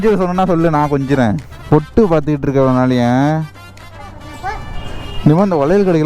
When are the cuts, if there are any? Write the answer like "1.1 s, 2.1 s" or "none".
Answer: 1.5 s